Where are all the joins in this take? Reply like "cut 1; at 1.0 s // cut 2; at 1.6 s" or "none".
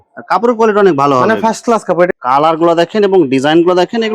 cut 1; at 2.1 s